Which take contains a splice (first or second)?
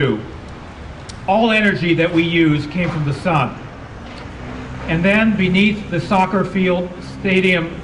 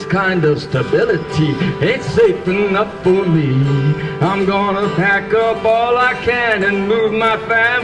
second